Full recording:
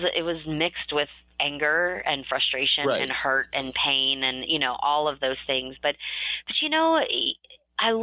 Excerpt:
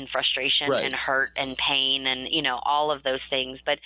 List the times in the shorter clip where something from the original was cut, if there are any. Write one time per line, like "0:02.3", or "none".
none